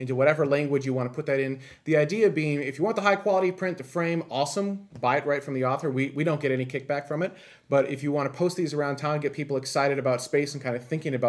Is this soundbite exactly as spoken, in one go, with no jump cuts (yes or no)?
yes